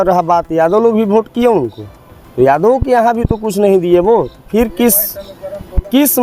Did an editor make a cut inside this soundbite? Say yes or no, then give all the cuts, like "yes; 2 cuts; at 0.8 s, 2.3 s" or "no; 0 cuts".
no; 0 cuts